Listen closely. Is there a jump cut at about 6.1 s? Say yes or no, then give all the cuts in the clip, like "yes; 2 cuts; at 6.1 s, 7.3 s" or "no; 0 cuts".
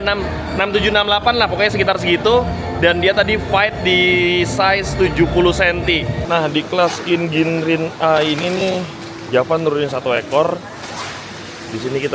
yes; 1 cut; at 6.1 s